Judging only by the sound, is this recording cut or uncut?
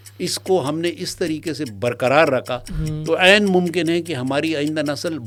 uncut